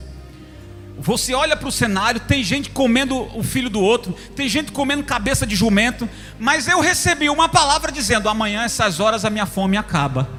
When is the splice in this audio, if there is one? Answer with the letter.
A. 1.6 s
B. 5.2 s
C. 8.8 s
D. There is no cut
D